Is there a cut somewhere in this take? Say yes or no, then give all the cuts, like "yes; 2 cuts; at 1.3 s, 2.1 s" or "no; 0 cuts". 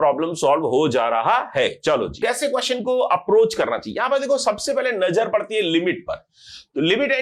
yes; 1 cut; at 2.2 s